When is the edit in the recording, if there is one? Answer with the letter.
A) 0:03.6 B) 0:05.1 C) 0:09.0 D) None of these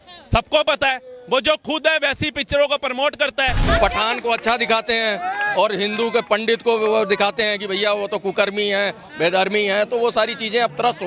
A